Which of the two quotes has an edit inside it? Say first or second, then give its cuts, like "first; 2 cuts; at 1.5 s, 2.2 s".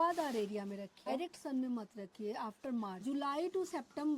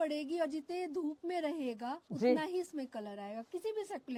first; 2 cuts; at 1.1 s, 3.0 s